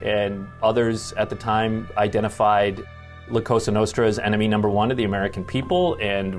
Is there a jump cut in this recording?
no; 0 cuts

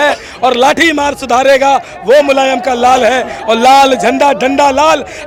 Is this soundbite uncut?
yes; 0 cuts

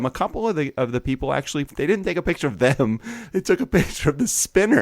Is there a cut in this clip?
yes; 1 cut; at 1.7 s

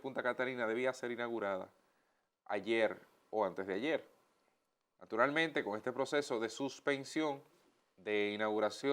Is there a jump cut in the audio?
no; 0 cuts

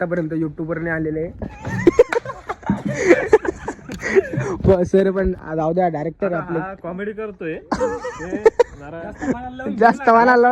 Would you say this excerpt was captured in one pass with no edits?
yes; 0 cuts

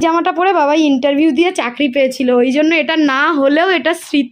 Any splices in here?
no; 0 cuts

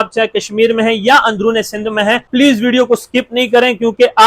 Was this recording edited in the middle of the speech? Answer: yes; 1 cut; at 2.3 s

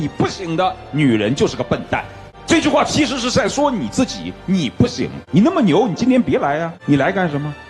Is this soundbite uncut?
no; 2 cuts; at 5.2 s, 6.7 s

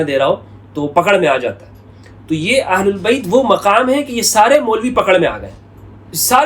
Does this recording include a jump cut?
no; 0 cuts

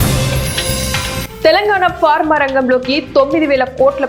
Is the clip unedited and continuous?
yes; 0 cuts

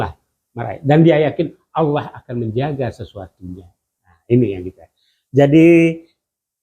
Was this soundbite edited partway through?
no; 0 cuts

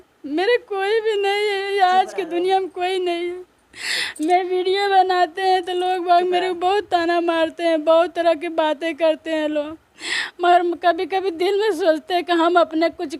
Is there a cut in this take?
no; 0 cuts

